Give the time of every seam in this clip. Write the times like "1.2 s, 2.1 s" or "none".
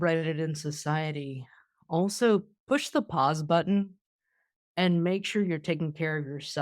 2.5 s